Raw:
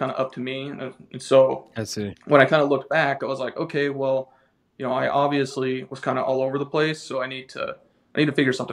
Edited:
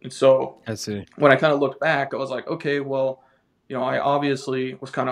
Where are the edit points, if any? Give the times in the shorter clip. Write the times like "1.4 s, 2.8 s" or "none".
none